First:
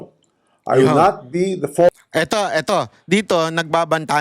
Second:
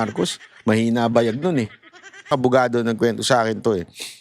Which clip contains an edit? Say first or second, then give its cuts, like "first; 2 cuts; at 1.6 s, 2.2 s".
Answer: second; 1 cut; at 2.3 s